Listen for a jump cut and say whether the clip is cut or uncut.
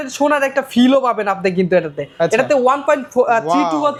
uncut